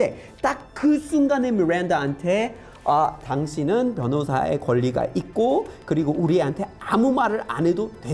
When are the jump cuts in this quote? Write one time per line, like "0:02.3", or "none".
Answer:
none